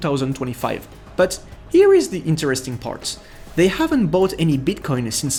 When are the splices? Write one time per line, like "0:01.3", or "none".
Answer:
none